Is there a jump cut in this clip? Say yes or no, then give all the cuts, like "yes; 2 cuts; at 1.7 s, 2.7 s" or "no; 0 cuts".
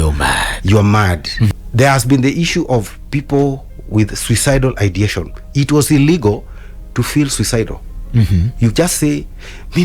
yes; 1 cut; at 1.5 s